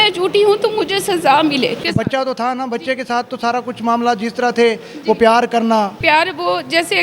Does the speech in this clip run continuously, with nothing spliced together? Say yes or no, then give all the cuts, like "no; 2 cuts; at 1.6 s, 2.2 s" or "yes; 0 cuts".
no; 2 cuts; at 1.8 s, 6.0 s